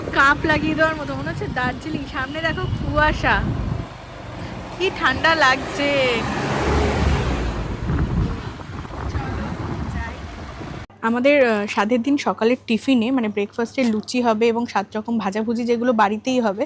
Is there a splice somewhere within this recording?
no; 0 cuts

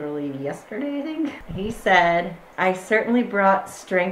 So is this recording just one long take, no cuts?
no; 2 cuts; at 1.4 s, 2.4 s

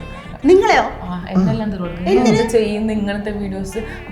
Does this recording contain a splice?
no; 0 cuts

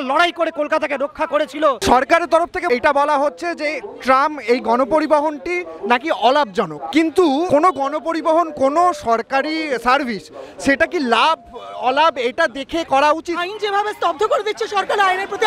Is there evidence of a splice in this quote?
yes; 3 cuts; at 1.8 s, 6.8 s, 13.3 s

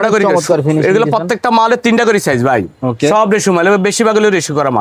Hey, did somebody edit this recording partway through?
no; 0 cuts

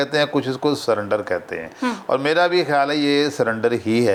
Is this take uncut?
yes; 0 cuts

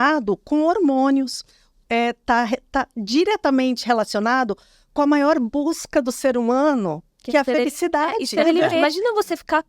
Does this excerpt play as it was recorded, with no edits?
no; 1 cut; at 8.7 s

